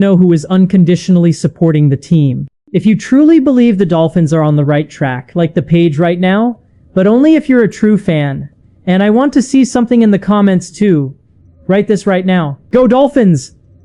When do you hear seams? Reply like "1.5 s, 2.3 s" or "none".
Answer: 12.6 s